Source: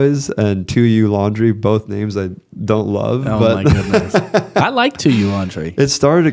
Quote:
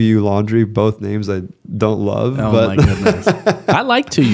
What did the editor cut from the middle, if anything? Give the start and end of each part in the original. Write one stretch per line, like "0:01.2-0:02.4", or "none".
none